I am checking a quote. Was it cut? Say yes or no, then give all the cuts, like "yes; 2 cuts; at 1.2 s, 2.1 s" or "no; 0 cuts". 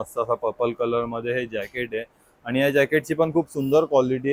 no; 0 cuts